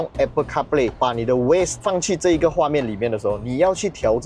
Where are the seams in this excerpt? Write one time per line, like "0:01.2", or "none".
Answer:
none